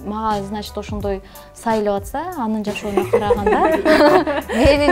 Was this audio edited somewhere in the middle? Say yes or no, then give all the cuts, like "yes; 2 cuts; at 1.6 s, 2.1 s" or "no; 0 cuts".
no; 0 cuts